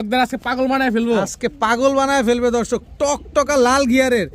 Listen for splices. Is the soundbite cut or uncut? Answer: uncut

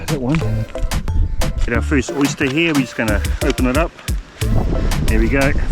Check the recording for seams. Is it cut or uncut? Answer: cut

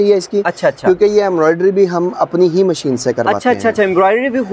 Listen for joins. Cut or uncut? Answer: uncut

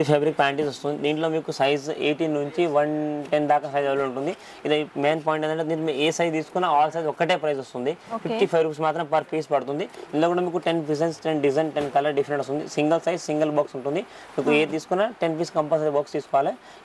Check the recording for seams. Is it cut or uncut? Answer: uncut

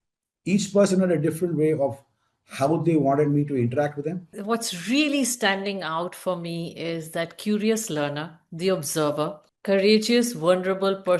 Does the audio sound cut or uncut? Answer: cut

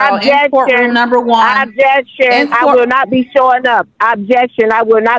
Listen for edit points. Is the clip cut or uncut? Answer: uncut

